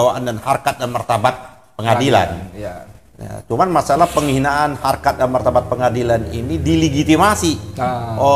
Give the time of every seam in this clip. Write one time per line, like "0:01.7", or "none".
none

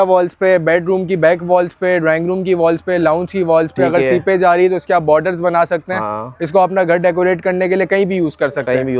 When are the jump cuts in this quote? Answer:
none

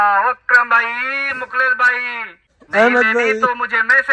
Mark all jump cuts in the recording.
none

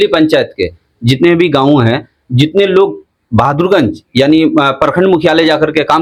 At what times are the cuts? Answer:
none

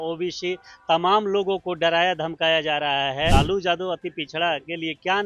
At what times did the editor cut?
0:03.3

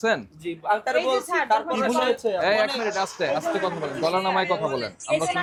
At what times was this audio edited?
none

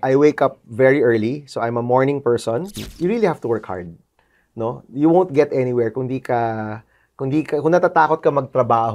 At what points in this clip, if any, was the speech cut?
0:02.8

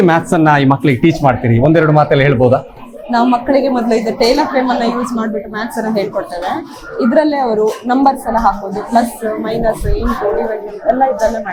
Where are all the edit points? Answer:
none

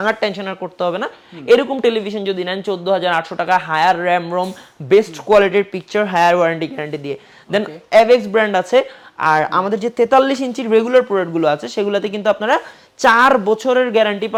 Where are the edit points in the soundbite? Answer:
none

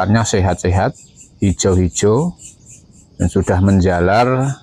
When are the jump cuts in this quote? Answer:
none

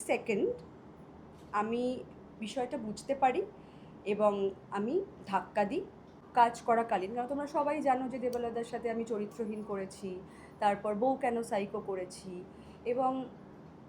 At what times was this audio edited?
0:06.2

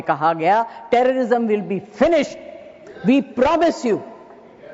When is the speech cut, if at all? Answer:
none

